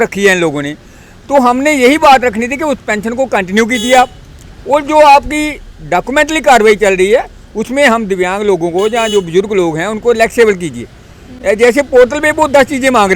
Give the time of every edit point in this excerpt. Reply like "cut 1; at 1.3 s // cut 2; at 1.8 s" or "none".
none